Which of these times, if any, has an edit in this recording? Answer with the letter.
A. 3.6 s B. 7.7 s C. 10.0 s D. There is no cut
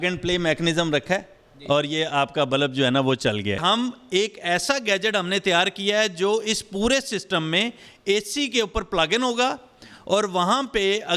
A